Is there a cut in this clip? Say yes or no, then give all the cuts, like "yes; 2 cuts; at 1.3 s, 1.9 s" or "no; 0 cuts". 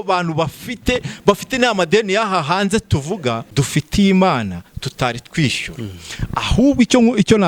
yes; 1 cut; at 3.4 s